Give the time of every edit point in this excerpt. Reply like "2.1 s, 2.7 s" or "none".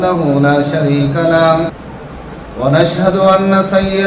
1.8 s